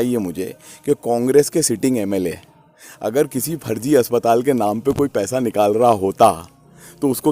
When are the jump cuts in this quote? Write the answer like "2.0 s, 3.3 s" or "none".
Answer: none